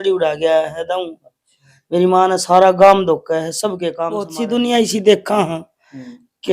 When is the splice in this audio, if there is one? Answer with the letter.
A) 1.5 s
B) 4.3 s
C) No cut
B